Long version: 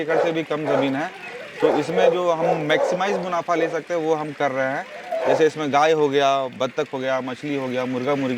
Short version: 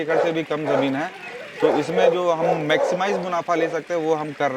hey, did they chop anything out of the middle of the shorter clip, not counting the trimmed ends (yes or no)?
no